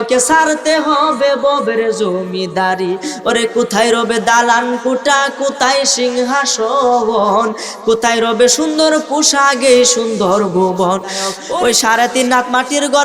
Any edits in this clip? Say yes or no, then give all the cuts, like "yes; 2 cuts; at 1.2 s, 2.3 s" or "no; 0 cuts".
yes; 1 cut; at 11.4 s